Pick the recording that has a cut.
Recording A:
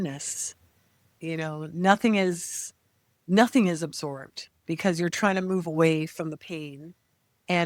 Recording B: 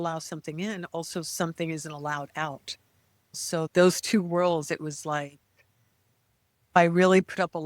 B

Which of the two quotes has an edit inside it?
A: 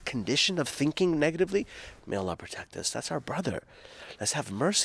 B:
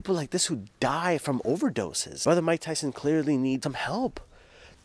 B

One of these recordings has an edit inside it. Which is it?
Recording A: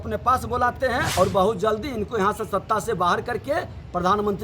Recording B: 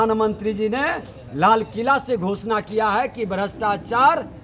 A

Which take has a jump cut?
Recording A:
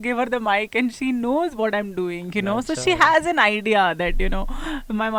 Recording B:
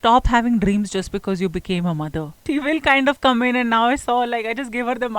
B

